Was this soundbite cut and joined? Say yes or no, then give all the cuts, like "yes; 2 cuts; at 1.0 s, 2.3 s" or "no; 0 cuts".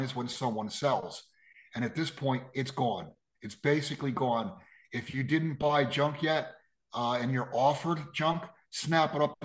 no; 0 cuts